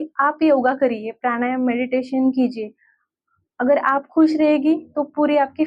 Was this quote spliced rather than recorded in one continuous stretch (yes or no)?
no